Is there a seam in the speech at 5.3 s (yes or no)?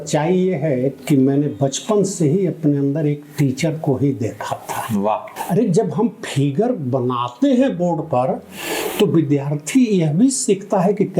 yes